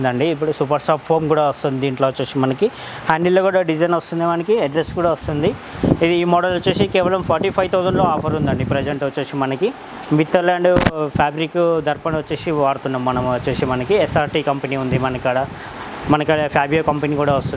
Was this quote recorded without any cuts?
yes; 0 cuts

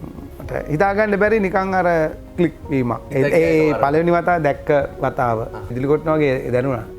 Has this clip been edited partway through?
yes; 2 cuts; at 3.0 s, 5.7 s

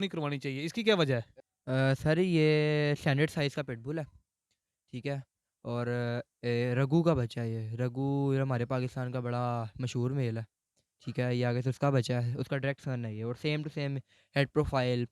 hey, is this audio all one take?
no; 1 cut; at 1.4 s

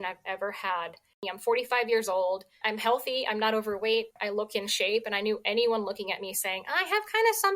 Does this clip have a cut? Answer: yes; 3 cuts; at 1.3 s, 2.6 s, 4.1 s

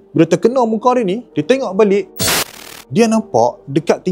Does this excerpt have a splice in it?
yes; 1 cut; at 2.2 s

